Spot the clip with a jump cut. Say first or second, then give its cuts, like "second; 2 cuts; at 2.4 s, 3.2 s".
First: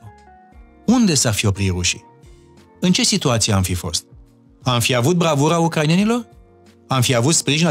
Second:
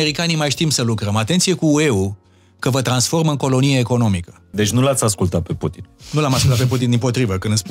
second; 1 cut; at 4.5 s